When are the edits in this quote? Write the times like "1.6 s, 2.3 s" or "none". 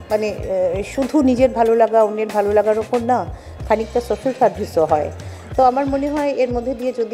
none